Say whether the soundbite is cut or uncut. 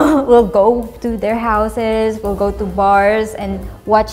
uncut